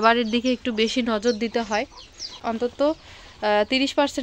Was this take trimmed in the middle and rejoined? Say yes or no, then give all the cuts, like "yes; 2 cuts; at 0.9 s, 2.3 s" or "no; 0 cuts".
yes; 1 cut; at 2.4 s